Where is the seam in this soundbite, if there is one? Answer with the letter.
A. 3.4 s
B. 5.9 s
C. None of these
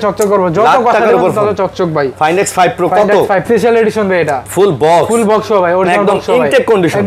A